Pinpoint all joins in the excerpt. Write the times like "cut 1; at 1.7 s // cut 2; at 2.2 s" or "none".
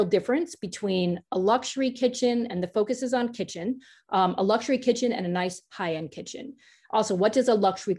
none